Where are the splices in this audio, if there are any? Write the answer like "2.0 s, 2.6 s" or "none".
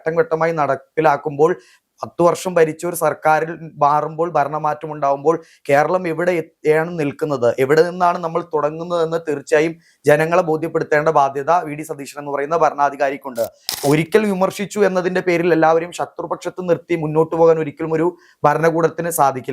13.6 s